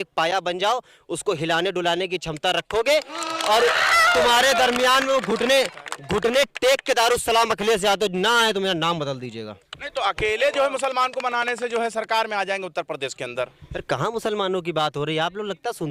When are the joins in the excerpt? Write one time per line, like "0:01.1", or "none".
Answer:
none